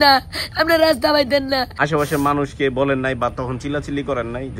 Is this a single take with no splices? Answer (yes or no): no